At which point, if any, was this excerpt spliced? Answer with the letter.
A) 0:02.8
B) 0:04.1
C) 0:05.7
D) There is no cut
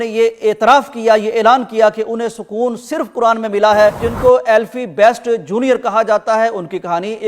B